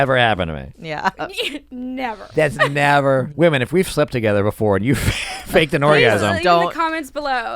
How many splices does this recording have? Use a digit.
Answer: 1